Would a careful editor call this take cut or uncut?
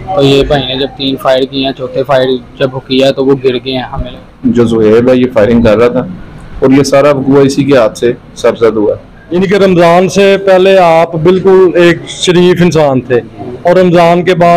cut